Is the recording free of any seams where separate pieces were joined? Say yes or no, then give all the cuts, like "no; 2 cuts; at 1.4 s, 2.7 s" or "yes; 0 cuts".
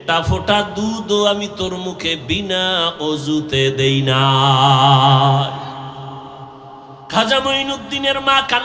no; 1 cut; at 7.0 s